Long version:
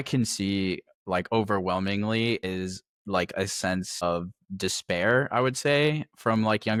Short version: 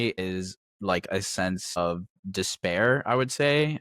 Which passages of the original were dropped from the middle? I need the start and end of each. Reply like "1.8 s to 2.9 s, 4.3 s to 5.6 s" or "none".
none